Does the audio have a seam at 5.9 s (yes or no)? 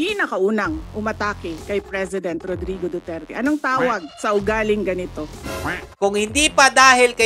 yes